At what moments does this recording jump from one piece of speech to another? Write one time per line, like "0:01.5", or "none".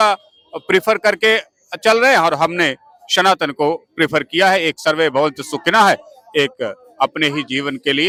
none